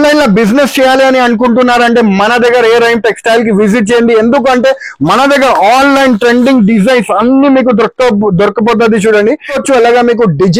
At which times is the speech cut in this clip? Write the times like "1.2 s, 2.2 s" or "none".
9.5 s